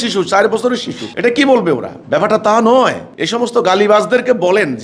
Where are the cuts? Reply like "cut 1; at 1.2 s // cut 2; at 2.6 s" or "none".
none